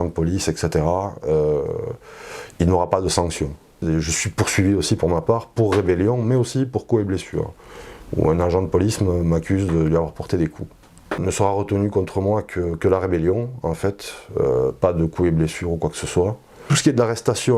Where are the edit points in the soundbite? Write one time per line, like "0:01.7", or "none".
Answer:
0:03.8
0:11.2
0:16.7